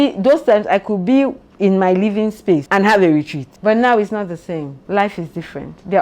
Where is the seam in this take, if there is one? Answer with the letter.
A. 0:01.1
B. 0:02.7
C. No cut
B